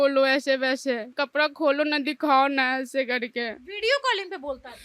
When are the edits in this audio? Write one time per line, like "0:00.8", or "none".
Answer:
0:01.1